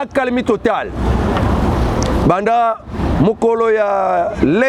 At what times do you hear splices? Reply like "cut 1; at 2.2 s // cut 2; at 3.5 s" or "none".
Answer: none